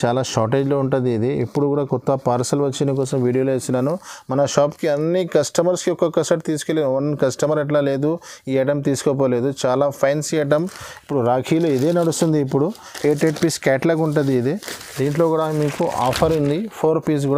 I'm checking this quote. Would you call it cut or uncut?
uncut